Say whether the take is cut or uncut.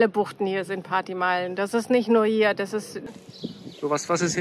cut